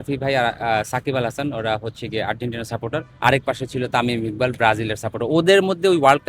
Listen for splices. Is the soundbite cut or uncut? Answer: cut